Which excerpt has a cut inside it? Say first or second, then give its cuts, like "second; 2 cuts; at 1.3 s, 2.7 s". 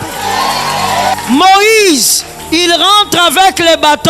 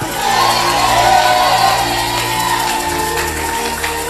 first; 1 cut; at 1.1 s